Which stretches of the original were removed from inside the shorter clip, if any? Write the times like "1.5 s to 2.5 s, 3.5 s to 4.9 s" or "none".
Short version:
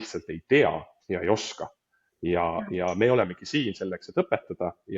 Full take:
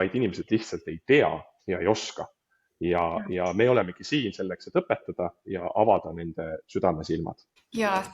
none